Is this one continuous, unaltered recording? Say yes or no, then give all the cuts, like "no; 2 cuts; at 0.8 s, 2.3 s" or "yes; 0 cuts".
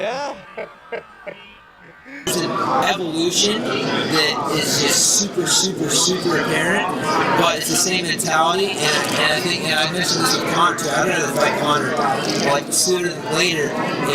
no; 1 cut; at 3.3 s